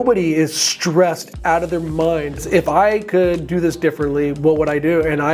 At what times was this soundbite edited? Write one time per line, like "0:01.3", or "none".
0:02.4